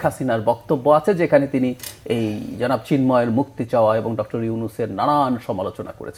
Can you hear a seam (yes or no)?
no